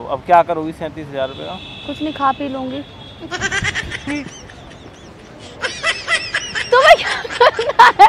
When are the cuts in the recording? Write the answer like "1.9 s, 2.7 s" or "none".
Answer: none